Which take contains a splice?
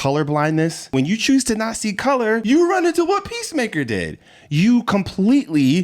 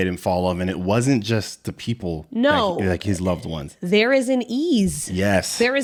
first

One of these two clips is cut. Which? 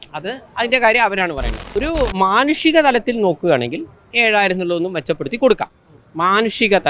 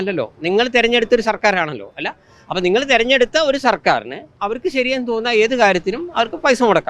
first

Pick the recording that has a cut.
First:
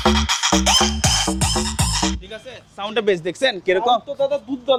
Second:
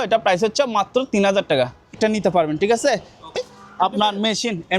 second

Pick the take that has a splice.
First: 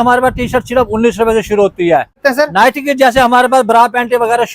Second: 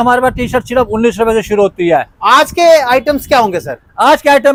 first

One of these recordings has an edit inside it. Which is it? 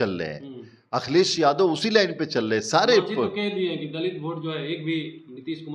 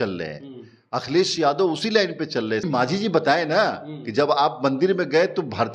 second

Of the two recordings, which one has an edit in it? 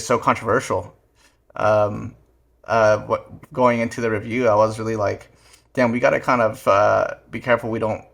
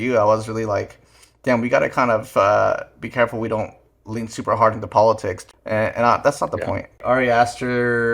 second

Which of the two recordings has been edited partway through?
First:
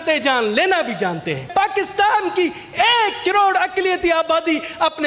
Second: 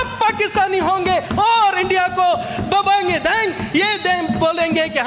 first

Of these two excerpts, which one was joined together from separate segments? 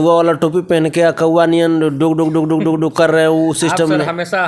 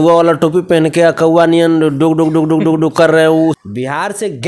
second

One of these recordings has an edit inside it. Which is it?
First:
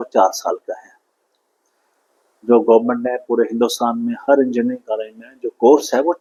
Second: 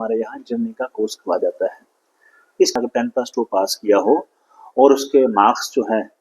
second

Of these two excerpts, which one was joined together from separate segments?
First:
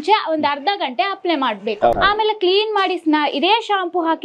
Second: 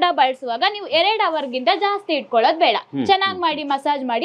first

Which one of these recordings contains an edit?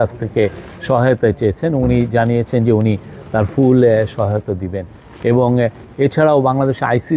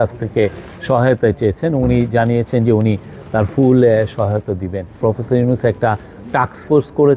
second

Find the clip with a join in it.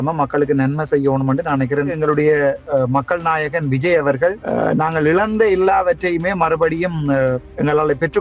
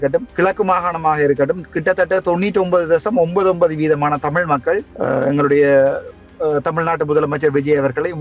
first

